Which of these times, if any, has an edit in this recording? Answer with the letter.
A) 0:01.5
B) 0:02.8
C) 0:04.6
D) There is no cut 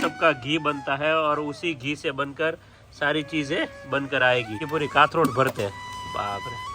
C